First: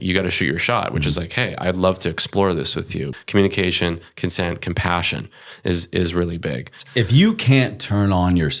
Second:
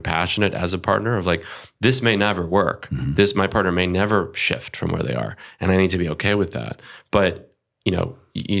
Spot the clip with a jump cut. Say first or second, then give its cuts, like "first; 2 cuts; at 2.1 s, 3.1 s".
first; 2 cuts; at 3.2 s, 6.8 s